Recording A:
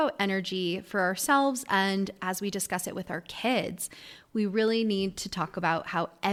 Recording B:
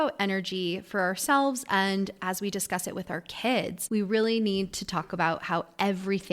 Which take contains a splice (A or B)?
B